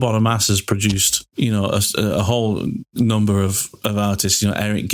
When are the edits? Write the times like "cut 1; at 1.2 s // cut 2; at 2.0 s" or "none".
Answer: cut 1; at 1.2 s